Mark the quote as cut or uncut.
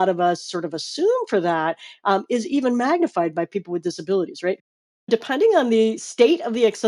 cut